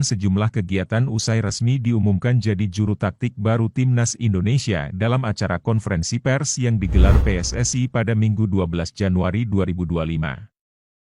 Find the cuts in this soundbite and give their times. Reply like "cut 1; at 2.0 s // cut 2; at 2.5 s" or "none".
cut 1; at 10.0 s